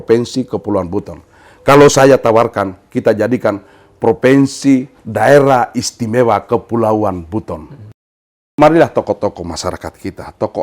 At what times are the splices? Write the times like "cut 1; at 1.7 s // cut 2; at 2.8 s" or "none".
cut 1; at 8.1 s